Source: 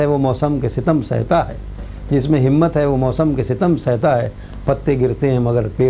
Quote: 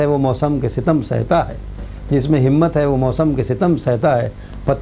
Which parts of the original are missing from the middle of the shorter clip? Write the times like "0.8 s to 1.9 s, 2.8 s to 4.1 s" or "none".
none